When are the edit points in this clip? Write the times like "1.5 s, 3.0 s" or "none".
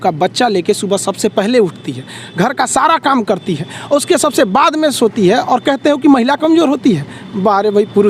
none

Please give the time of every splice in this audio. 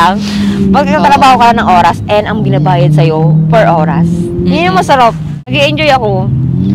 5.4 s

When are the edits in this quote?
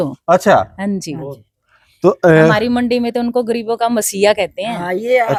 none

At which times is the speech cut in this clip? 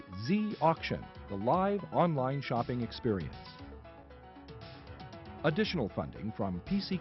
3.3 s, 5.3 s

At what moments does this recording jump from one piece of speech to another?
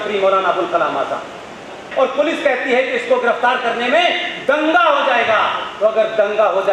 1.9 s

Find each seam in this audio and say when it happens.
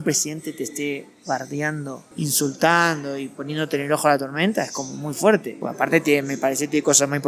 2.0 s, 5.6 s

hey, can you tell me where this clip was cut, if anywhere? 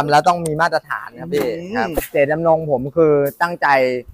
2.0 s

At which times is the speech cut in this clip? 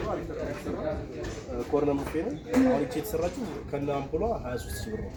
none

